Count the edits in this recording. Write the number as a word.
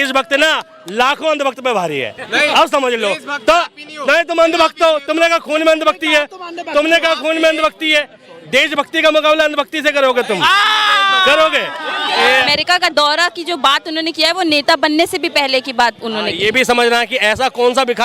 one